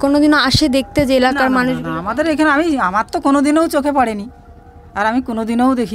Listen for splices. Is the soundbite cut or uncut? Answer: uncut